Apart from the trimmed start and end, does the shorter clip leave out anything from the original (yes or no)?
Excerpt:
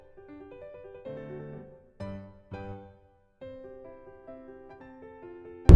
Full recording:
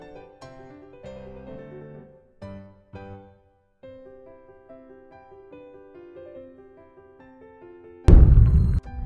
yes